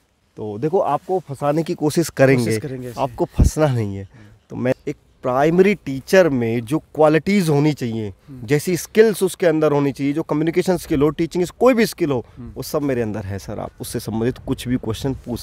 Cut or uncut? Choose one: cut